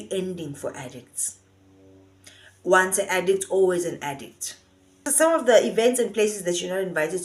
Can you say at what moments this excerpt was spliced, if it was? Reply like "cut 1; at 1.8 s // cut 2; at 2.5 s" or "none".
cut 1; at 5.0 s